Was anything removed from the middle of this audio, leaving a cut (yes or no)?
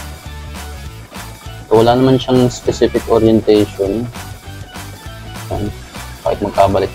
no